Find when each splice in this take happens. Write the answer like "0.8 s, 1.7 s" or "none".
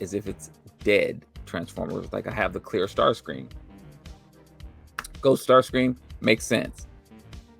none